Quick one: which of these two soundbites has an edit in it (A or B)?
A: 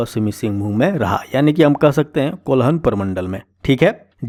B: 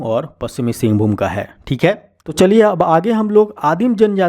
B